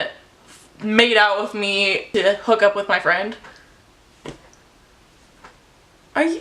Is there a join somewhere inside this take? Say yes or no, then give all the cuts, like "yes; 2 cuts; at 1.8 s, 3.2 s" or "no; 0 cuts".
yes; 1 cut; at 2.0 s